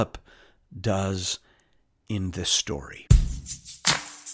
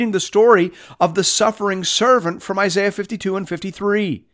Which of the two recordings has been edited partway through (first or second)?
first